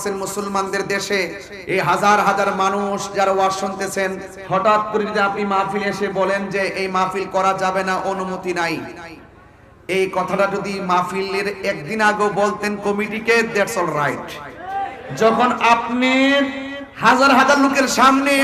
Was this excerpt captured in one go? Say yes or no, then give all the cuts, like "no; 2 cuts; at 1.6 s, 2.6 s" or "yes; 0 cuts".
no; 2 cuts; at 1.5 s, 4.3 s